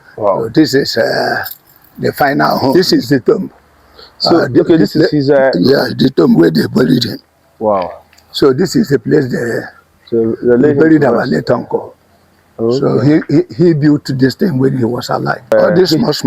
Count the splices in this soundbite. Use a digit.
2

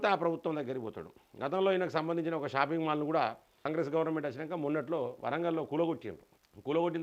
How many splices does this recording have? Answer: 0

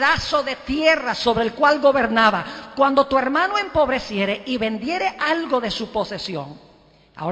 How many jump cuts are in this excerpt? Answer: 1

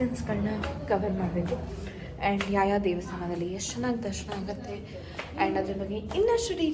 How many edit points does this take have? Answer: 0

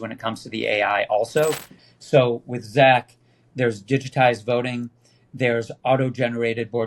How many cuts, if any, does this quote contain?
1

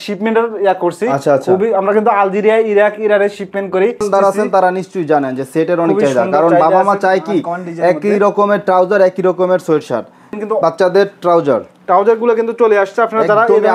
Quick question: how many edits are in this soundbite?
2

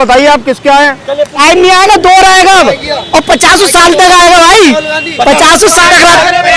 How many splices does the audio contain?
1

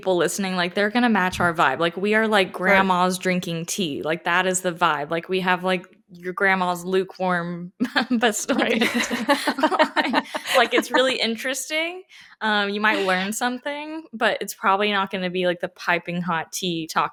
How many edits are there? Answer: 0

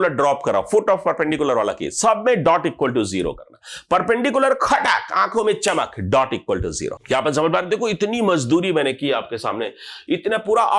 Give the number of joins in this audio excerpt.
1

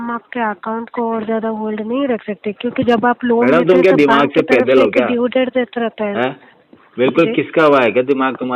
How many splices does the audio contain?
0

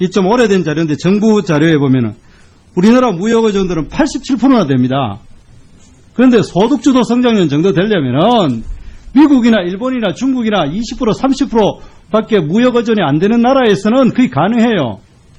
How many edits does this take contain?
0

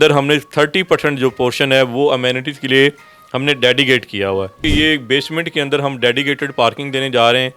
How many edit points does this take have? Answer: 1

